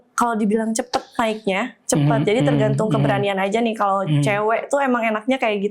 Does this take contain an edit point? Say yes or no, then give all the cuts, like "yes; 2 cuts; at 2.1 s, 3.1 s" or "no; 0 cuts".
no; 0 cuts